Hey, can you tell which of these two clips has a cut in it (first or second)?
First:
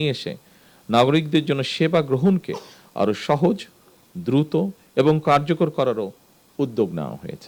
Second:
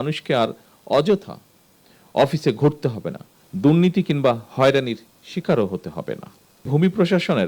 second